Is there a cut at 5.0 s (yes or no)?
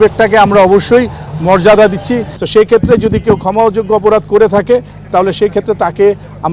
no